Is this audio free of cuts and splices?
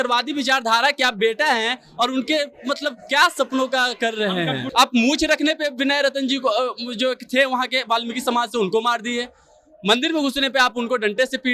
no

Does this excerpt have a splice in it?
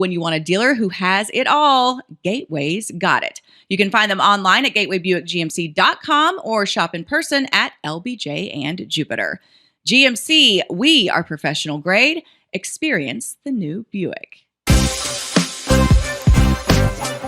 yes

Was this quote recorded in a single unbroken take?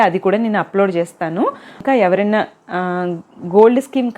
no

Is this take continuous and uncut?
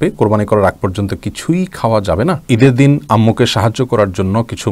no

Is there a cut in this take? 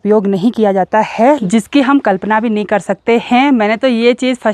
yes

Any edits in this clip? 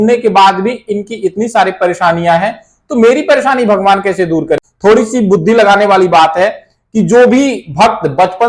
yes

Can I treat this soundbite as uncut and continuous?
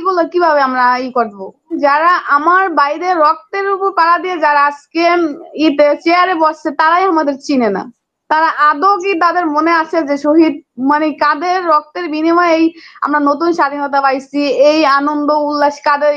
no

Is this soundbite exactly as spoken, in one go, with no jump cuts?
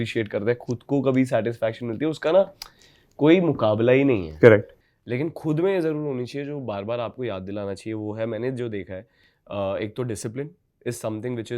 no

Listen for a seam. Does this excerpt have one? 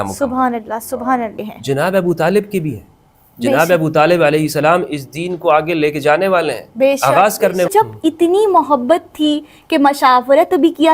yes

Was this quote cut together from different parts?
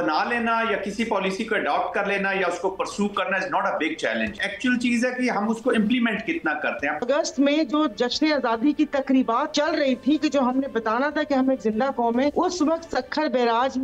yes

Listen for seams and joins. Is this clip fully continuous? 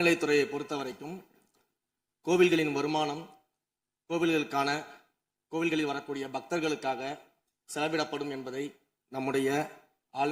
yes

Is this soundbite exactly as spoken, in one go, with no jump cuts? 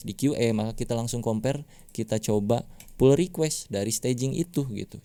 yes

